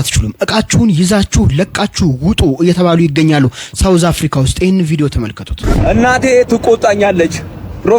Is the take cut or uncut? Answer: cut